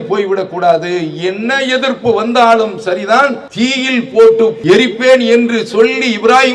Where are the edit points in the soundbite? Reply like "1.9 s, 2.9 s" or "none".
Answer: 3.4 s, 4.6 s